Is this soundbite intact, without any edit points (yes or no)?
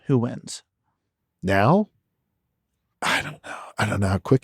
no